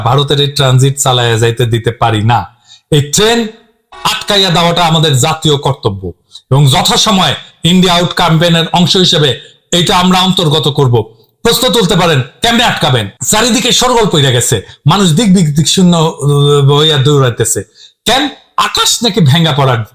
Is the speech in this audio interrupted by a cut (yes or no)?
yes